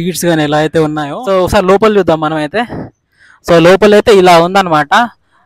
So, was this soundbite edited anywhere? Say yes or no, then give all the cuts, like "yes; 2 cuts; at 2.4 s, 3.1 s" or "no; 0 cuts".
yes; 1 cut; at 1.1 s